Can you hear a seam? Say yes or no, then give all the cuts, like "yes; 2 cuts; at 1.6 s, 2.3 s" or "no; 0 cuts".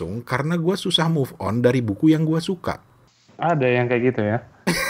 no; 0 cuts